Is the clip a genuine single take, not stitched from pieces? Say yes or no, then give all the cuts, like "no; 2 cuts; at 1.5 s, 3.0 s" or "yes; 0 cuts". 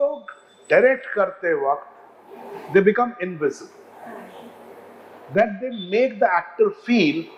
yes; 0 cuts